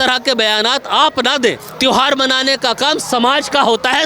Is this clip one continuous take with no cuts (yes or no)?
no